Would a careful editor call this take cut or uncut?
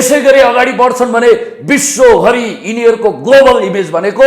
uncut